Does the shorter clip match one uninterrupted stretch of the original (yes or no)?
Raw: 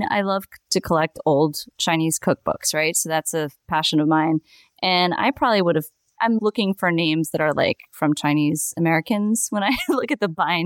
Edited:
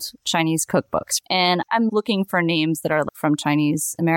no